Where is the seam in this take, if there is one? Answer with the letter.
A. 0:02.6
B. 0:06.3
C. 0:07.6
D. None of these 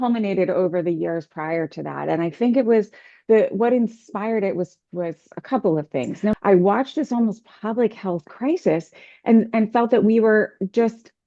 B